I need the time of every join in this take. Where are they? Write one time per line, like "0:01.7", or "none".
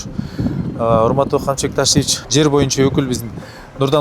0:02.2